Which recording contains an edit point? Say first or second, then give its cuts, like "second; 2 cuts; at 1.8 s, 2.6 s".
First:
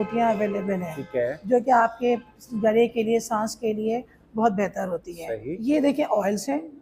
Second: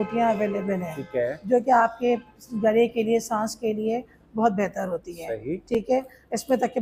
first; 1 cut; at 5.5 s